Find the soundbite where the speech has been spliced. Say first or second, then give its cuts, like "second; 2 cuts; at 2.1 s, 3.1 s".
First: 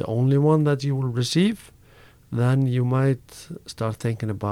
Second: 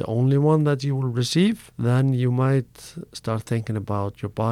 second; 1 cut; at 1.7 s